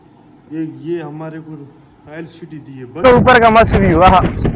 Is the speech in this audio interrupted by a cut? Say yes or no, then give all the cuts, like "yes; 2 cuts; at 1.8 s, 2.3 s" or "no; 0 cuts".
yes; 1 cut; at 3.0 s